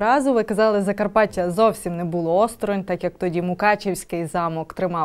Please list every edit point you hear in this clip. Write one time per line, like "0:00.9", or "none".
none

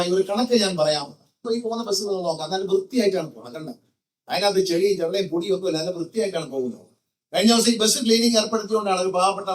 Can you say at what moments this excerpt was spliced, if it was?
0:01.4

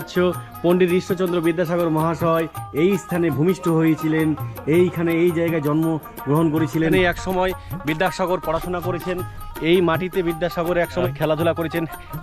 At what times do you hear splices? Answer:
0:06.8
0:09.5

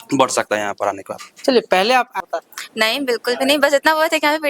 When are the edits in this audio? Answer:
0:02.2

